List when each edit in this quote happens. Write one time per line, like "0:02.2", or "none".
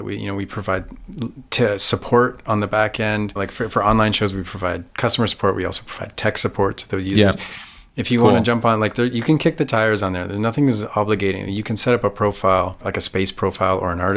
0:03.4
0:12.8